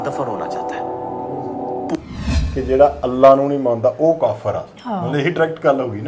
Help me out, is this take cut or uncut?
cut